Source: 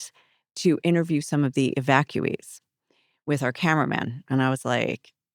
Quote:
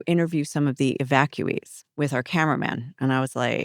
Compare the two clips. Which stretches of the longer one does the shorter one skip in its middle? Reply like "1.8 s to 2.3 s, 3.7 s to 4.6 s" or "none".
2.5 s to 3.1 s